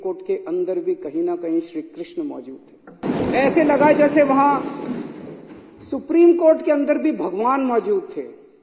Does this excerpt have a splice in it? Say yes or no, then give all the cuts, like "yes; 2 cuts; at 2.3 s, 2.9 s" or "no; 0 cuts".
yes; 1 cut; at 3.0 s